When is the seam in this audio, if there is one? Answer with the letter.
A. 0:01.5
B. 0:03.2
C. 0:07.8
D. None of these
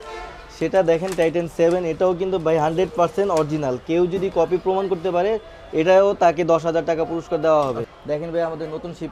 C